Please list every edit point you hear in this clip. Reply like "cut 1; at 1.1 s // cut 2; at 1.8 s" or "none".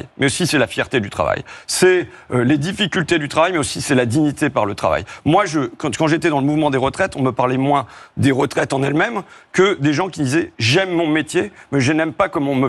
none

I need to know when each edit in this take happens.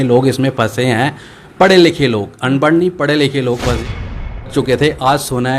cut 1; at 4.2 s

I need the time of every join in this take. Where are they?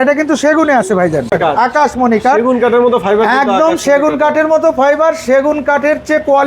cut 1; at 1.3 s

